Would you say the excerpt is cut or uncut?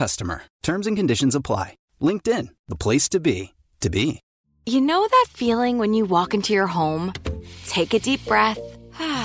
cut